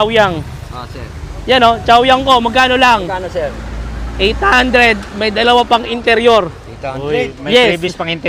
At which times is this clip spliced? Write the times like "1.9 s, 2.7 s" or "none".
none

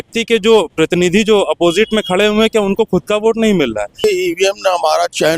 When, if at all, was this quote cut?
4.0 s

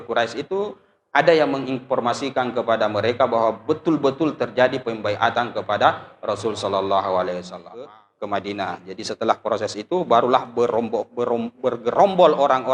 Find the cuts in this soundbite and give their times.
7.9 s

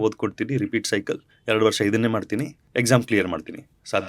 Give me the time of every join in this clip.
1.3 s, 2.6 s

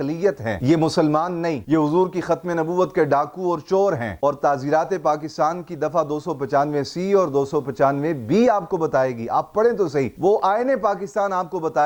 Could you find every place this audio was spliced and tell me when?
none

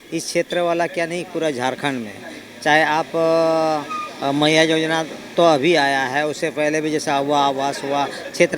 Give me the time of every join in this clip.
none

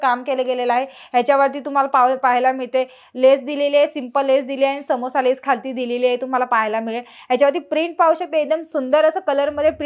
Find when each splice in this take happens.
none

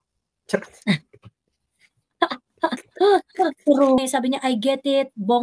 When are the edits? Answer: 4.0 s

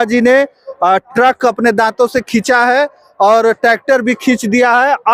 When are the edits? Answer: none

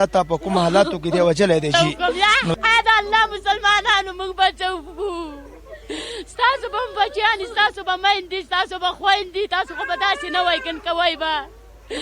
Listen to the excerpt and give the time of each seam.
1.7 s

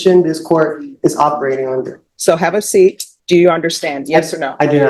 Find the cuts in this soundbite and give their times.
2.0 s, 3.1 s

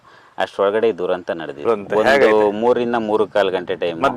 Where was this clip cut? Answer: 1.6 s

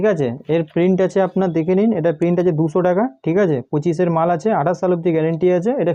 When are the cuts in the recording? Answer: none

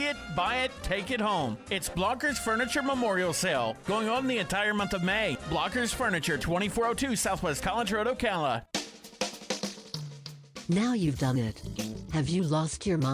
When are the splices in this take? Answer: 8.7 s

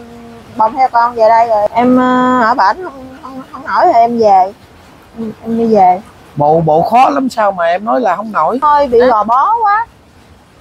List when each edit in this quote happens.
1.7 s, 8.6 s

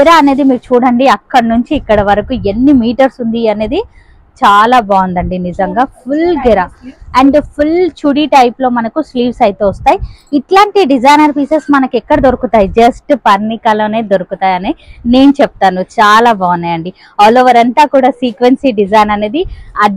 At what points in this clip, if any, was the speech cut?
none

